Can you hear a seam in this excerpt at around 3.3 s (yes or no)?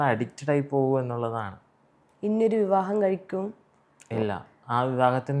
no